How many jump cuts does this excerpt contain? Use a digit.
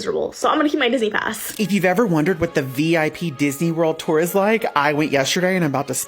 1